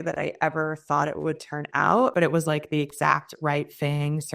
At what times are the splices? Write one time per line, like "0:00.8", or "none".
0:02.1